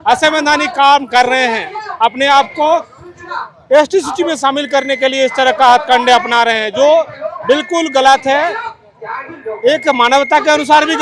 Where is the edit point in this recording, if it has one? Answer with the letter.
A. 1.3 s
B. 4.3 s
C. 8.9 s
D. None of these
D